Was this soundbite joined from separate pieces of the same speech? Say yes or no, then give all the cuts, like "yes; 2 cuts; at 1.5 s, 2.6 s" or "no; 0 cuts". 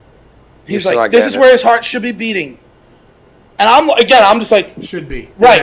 no; 0 cuts